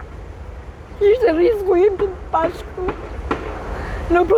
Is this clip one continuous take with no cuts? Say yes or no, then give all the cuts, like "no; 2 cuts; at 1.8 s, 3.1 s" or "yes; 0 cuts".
yes; 0 cuts